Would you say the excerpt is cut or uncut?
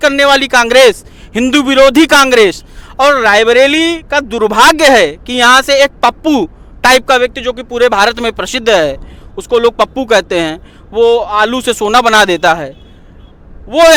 uncut